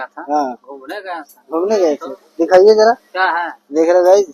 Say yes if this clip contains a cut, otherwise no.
no